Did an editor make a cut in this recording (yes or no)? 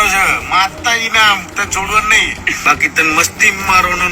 yes